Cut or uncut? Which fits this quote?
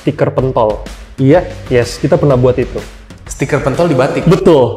uncut